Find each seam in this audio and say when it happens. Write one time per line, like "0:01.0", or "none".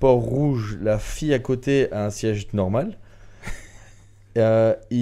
none